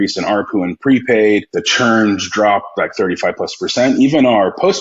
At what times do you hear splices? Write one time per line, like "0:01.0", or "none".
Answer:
0:01.6